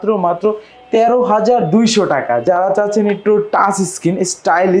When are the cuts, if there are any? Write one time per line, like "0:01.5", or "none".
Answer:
0:02.4